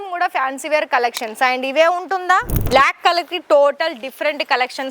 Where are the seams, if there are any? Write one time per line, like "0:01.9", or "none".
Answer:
0:02.5

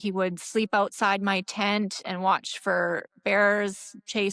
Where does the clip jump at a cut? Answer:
none

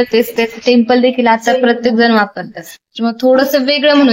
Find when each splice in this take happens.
none

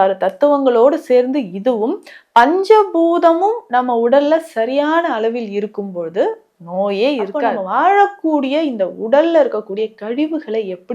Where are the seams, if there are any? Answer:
0:07.5

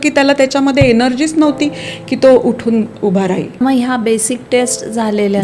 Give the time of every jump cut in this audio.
0:03.6

